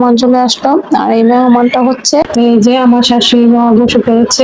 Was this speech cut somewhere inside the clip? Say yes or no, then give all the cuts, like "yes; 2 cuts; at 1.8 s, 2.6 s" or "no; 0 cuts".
yes; 1 cut; at 2.2 s